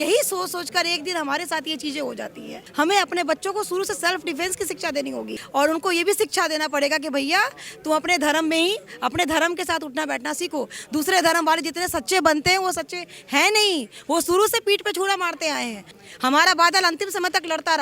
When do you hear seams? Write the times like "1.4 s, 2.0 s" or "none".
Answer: 2.6 s, 5.4 s, 15.9 s

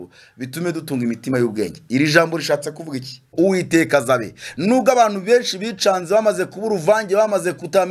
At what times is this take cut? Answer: 3.3 s

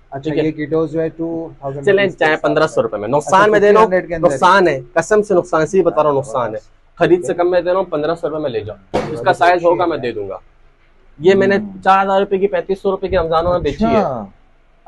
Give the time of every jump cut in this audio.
none

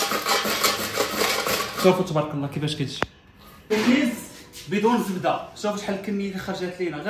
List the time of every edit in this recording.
3.7 s

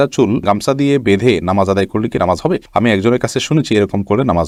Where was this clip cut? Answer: none

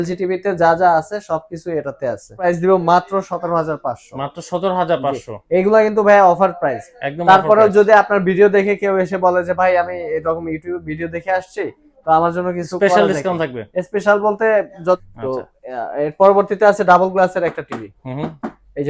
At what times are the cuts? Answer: 2.4 s, 15.0 s

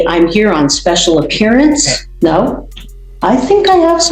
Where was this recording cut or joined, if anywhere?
2.0 s

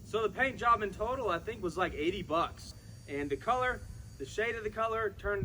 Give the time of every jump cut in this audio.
2.7 s

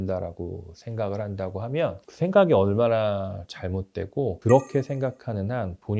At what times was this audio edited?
none

